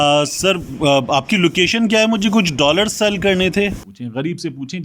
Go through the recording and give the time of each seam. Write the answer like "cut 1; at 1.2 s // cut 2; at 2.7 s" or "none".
cut 1; at 3.9 s